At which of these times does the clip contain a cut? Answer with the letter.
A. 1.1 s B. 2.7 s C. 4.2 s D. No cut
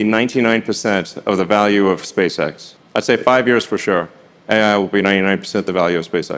D